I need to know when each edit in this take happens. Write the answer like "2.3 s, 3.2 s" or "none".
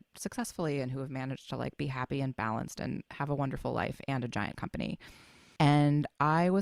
5.4 s